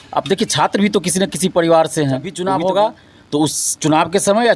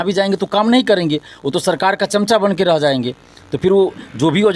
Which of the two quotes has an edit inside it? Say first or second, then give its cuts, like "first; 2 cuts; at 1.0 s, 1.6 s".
first; 1 cut; at 2.3 s